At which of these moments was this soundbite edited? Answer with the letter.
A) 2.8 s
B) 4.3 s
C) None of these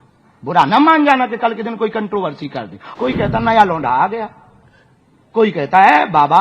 A